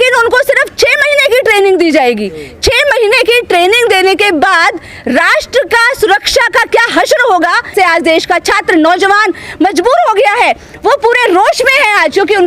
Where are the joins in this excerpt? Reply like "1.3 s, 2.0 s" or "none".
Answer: 7.7 s